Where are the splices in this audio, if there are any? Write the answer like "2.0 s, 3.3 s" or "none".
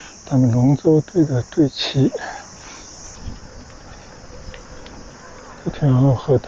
3.2 s